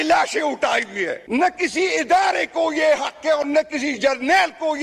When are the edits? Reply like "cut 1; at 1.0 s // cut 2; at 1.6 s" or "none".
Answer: cut 1; at 1.1 s